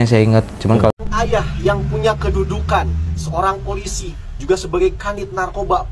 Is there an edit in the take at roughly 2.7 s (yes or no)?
no